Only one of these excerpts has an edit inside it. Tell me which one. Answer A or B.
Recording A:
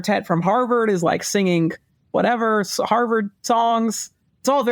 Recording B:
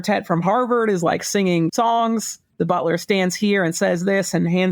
B